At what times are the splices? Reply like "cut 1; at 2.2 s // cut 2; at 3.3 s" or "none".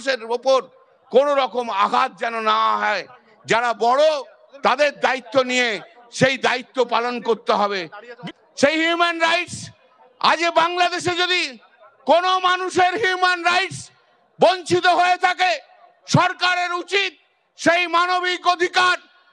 cut 1; at 8.1 s